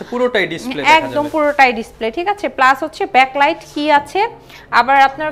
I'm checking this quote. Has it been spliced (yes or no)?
no